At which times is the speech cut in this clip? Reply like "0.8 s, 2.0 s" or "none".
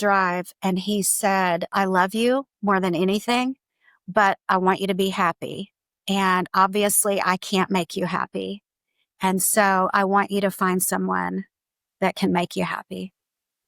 1.7 s